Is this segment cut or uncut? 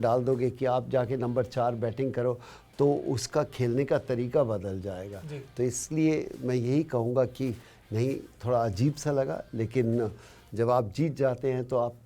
uncut